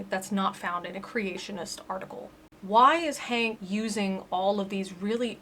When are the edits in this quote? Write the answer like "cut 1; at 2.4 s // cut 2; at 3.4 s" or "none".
cut 1; at 2.2 s // cut 2; at 3.6 s